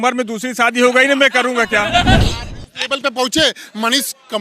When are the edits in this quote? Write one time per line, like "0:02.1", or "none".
0:02.2